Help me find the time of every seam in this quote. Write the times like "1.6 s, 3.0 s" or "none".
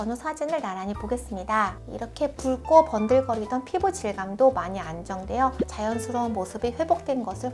none

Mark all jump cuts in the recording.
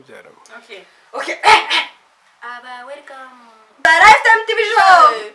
3.9 s

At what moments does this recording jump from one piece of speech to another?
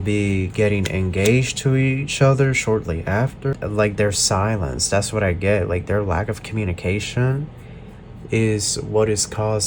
3.5 s

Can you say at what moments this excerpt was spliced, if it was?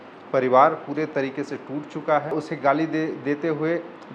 2.3 s

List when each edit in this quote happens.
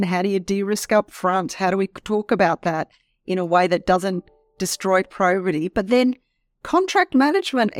none

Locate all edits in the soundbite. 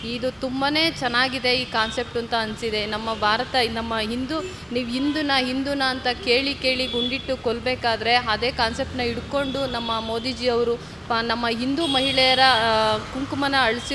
none

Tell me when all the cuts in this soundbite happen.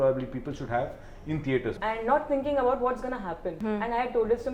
1.8 s, 3.6 s

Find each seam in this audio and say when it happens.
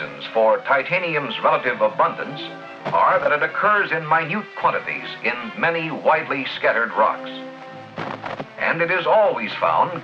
4.9 s

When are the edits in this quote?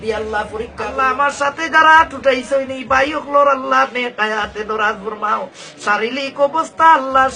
0.9 s

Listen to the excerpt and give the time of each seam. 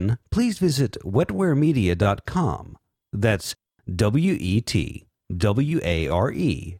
none

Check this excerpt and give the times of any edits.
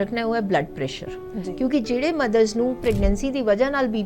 2.8 s

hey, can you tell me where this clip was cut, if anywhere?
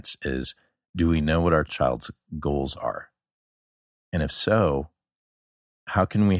1.7 s

